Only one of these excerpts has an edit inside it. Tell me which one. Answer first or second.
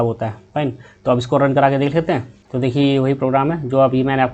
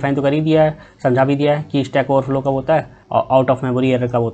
first